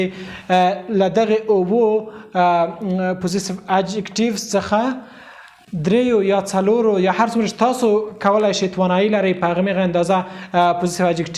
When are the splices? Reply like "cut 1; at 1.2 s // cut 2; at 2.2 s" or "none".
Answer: none